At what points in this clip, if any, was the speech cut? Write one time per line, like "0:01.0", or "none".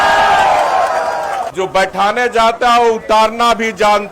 0:01.5